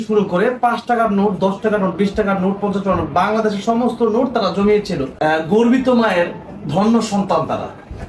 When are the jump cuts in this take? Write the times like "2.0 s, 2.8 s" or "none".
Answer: 5.1 s

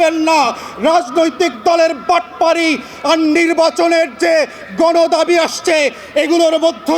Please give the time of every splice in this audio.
none

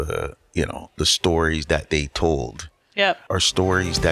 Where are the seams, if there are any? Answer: 3.2 s

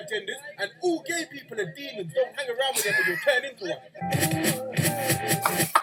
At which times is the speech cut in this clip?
none

